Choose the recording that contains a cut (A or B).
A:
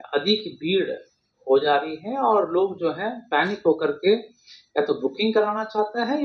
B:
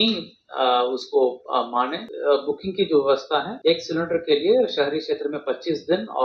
B